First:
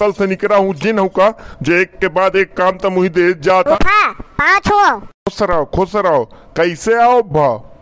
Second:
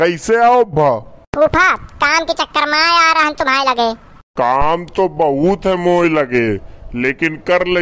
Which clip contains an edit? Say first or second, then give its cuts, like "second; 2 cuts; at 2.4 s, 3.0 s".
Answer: first; 1 cut; at 3.7 s